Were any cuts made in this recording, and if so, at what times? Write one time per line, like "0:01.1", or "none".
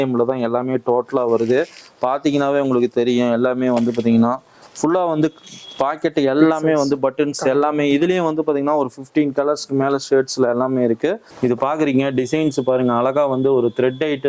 0:11.3